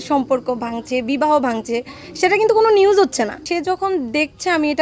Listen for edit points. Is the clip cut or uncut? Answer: cut